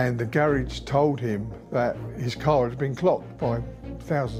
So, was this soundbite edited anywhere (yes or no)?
no